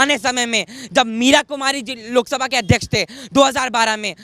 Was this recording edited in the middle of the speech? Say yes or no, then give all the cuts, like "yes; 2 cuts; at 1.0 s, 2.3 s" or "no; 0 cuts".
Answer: no; 0 cuts